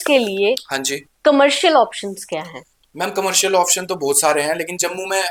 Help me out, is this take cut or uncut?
uncut